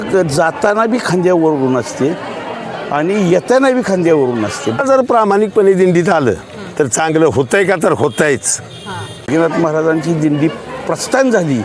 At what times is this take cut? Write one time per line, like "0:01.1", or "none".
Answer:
0:04.8
0:09.3